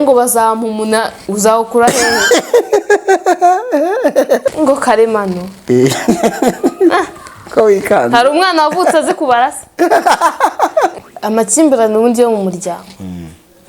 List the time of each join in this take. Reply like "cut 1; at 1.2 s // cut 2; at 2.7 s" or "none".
cut 1; at 4.4 s // cut 2; at 10.9 s